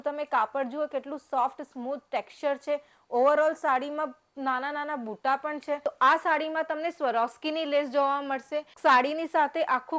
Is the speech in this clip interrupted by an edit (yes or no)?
yes